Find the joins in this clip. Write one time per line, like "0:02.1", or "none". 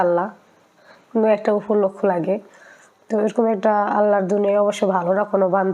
none